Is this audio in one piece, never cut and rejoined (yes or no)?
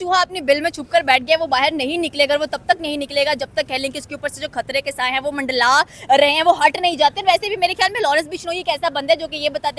yes